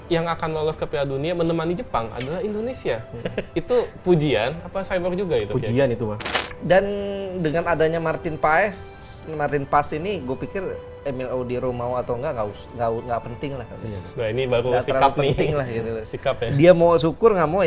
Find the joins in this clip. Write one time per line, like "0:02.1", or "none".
0:06.2